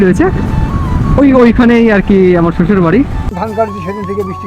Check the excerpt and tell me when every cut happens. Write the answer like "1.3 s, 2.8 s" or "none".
3.3 s